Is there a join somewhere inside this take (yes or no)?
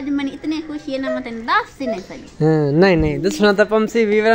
no